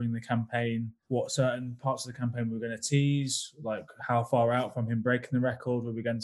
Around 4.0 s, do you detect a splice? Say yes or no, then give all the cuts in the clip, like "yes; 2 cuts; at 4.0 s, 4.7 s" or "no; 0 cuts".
no; 1 cut; at 1.0 s